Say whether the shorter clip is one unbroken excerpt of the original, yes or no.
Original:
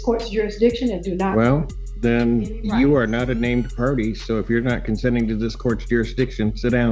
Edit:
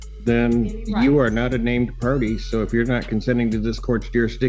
yes